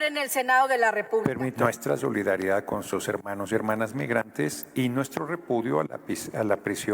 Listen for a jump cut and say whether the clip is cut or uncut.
cut